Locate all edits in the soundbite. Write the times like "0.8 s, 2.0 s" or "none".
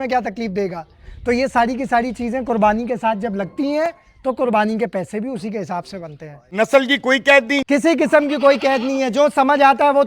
6.4 s, 7.6 s